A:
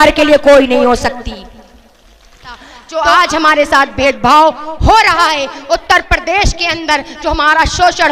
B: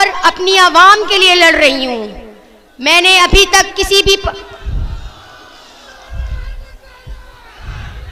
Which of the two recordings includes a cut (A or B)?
A